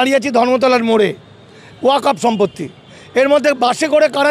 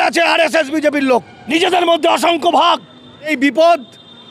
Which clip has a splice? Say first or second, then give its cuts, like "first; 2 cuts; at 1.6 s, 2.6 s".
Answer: second; 2 cuts; at 1.4 s, 3.3 s